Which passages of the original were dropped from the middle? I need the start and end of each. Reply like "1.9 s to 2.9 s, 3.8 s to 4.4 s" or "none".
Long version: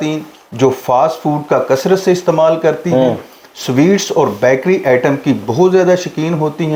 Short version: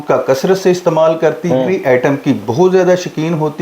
3.1 s to 4.7 s